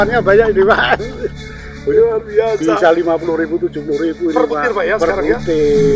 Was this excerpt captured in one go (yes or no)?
yes